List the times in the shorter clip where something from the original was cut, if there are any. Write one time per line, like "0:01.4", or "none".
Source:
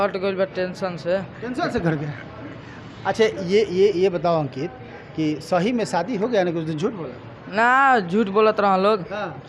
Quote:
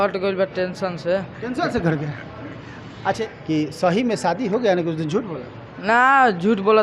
0:03.2